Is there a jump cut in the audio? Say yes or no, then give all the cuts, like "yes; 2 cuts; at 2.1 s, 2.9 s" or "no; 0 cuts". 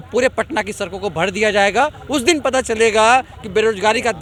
no; 0 cuts